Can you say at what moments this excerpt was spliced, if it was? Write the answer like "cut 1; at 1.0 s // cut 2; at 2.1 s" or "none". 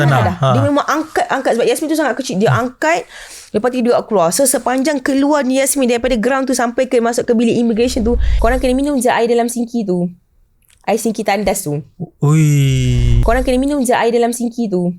cut 1; at 8.3 s // cut 2; at 13.2 s